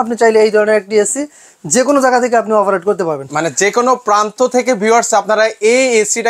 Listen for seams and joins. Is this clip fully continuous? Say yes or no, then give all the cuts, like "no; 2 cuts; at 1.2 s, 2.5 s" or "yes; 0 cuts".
yes; 0 cuts